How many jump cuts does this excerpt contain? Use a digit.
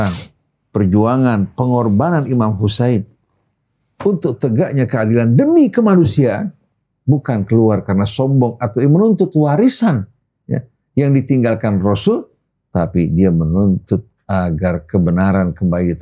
0